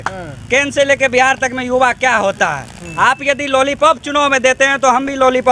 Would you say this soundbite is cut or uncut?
uncut